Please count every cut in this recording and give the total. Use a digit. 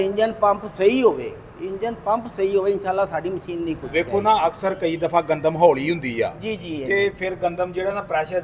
1